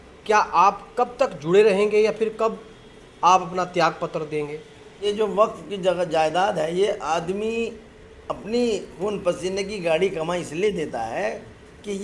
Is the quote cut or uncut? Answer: cut